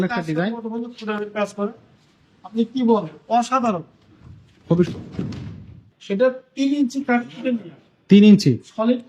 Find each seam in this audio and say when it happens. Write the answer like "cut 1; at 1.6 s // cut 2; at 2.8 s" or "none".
cut 1; at 5.8 s